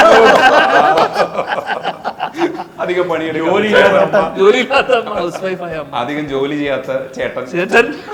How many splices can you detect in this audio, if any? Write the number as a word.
zero